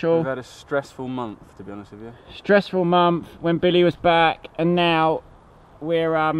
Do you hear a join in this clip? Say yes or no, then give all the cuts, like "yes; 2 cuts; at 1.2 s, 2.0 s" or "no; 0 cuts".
no; 0 cuts